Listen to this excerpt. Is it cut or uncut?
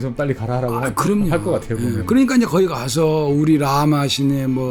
uncut